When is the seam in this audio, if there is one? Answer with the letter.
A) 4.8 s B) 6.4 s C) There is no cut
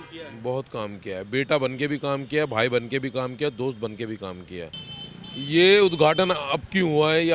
A